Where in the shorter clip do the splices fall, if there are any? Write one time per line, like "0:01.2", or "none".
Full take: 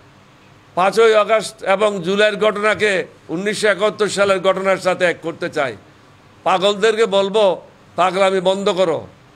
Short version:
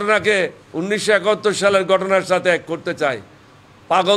none

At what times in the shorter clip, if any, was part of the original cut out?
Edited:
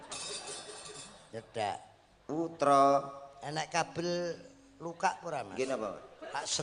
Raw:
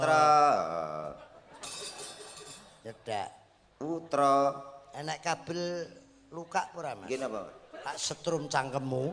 none

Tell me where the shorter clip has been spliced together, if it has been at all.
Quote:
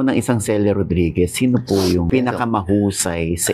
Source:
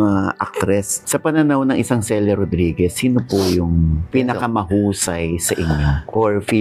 0:02.1

